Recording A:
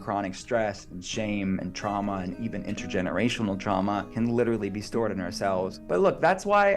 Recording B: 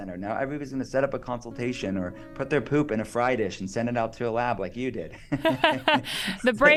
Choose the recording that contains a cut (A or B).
A